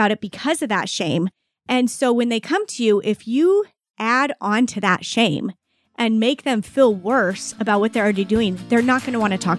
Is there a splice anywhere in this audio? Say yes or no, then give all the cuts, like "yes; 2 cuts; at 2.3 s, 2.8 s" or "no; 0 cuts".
no; 0 cuts